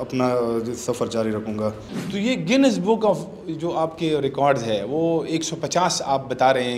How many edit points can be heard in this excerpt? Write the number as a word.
one